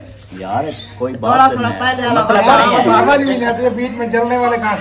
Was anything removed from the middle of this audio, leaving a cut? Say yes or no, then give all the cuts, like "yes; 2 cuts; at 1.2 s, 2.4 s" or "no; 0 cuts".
no; 0 cuts